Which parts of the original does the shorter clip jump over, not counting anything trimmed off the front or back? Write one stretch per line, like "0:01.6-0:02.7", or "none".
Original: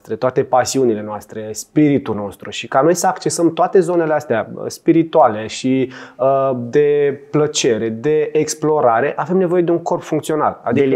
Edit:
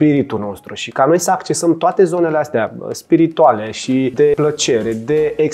0:06.0-0:07.2